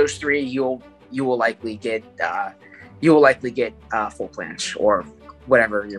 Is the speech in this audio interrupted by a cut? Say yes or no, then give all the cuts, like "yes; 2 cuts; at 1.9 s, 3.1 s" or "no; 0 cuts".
no; 0 cuts